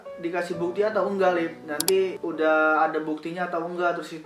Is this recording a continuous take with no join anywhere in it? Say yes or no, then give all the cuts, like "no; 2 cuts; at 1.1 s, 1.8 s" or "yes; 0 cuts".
yes; 0 cuts